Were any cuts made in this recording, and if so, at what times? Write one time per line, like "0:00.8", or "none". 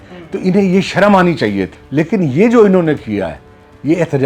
0:01.8